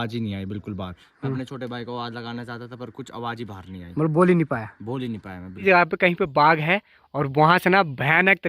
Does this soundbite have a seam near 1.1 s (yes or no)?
no